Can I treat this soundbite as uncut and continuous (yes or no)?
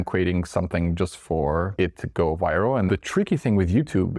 no